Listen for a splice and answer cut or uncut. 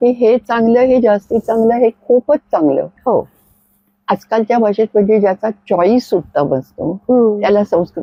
uncut